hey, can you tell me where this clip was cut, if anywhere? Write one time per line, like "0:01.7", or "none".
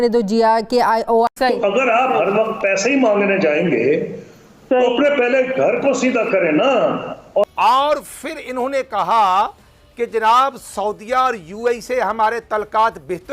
0:01.3
0:07.4